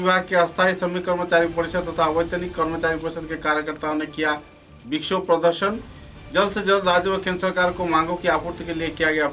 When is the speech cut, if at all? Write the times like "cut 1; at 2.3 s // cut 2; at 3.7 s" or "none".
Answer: none